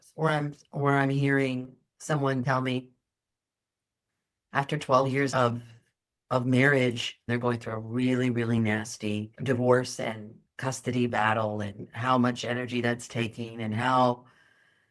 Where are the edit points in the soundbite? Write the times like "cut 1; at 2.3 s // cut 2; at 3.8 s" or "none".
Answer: cut 1; at 5.3 s // cut 2; at 9.3 s